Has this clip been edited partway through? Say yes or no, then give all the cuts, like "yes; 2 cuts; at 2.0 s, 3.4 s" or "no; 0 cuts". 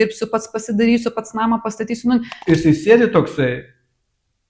yes; 1 cut; at 2.3 s